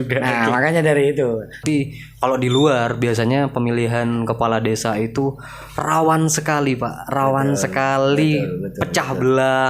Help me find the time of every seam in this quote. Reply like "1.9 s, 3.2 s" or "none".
1.5 s